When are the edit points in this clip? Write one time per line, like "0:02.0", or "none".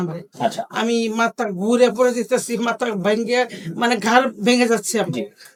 none